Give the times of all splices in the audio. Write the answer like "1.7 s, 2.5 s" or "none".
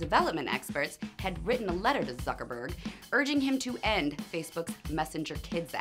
3.1 s